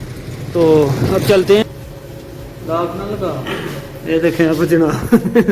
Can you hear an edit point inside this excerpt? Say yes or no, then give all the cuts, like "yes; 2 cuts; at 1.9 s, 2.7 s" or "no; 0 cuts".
yes; 1 cut; at 1.6 s